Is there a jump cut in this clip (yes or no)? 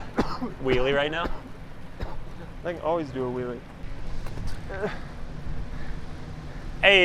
yes